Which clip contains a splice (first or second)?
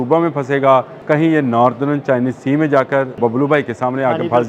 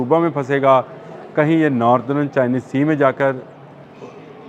first